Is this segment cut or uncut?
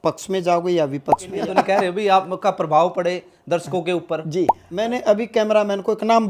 cut